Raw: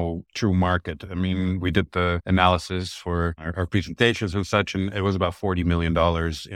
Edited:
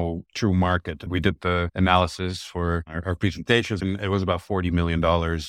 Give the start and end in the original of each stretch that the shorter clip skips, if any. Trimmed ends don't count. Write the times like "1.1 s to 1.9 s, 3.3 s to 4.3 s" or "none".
1.1 s to 1.6 s, 4.3 s to 4.7 s